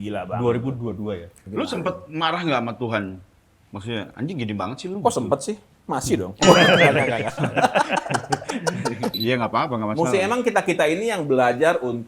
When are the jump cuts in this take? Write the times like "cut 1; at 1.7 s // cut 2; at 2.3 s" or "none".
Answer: cut 1; at 1.4 s // cut 2; at 9.1 s